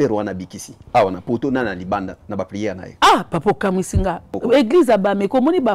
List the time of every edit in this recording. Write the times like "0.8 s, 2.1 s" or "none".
4.3 s